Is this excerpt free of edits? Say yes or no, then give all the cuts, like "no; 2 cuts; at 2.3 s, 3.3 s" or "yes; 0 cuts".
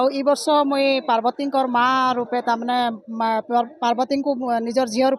yes; 0 cuts